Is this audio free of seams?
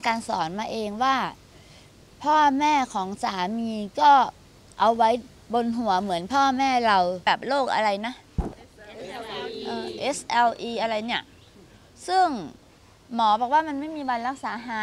no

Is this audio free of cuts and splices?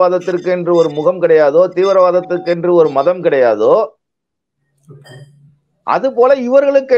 yes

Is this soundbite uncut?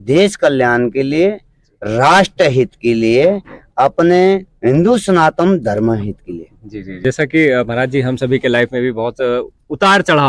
no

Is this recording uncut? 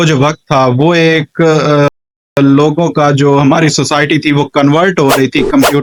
yes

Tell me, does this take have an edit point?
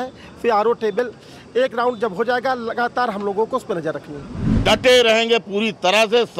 yes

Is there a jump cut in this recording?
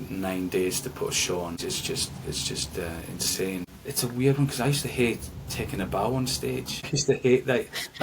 yes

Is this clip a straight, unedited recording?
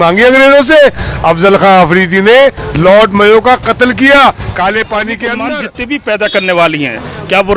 no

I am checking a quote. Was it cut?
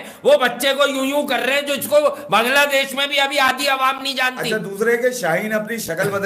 no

